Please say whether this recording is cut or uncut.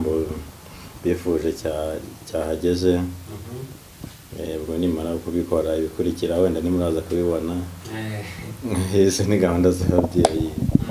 uncut